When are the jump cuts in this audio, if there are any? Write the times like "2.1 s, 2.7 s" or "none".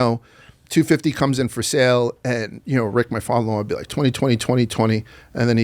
none